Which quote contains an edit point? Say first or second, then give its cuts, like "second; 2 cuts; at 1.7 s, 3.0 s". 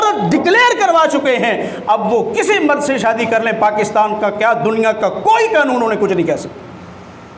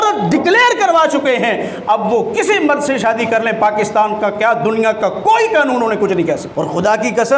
second; 1 cut; at 6.5 s